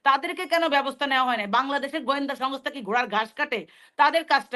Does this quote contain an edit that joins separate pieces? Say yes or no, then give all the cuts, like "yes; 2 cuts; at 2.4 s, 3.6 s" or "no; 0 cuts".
no; 0 cuts